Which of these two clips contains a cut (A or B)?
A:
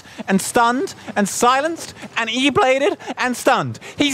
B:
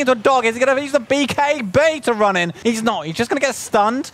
B